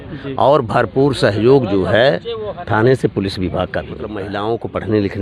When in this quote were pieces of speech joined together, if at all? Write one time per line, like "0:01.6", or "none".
0:04.3